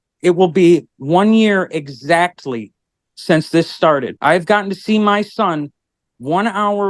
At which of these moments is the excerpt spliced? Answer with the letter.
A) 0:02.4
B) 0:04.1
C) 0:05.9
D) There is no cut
B